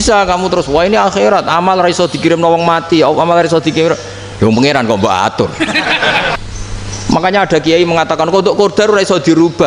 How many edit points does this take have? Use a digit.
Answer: 1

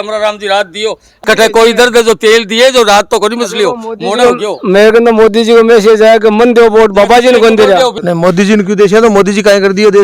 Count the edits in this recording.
2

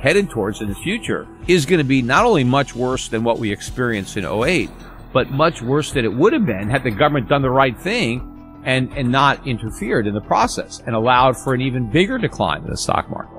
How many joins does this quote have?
1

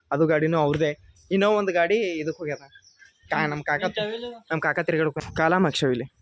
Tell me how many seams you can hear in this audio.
1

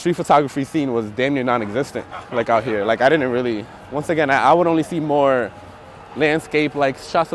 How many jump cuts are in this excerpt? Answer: 0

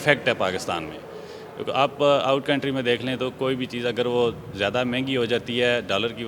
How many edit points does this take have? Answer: 0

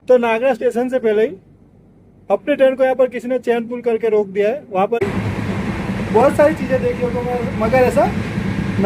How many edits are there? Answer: 1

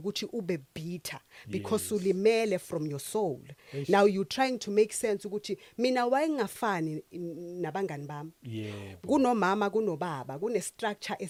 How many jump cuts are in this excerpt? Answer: 0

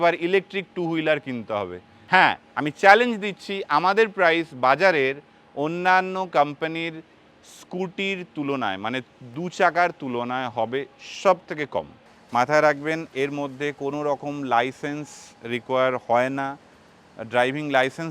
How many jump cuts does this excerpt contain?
3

